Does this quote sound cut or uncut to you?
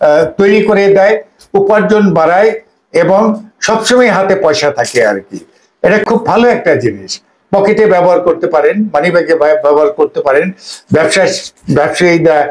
uncut